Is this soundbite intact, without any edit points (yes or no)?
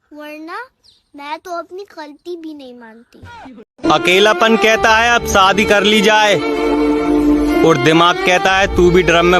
no